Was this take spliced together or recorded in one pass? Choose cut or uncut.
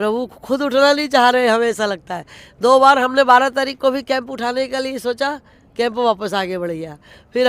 uncut